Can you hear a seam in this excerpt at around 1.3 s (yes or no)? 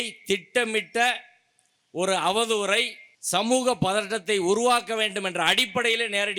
no